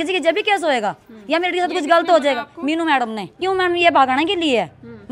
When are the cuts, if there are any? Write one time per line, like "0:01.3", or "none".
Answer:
0:03.4